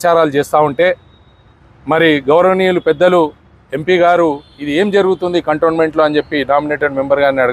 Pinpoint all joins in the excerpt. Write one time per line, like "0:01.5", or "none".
none